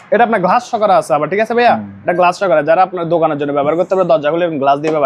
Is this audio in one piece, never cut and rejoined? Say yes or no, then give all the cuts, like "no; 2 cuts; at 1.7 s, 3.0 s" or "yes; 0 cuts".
yes; 0 cuts